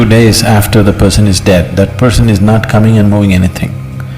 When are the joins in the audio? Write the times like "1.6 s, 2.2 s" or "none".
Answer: none